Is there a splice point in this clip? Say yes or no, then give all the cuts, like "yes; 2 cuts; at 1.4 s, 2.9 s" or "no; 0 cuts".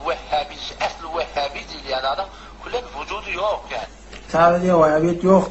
yes; 1 cut; at 4.0 s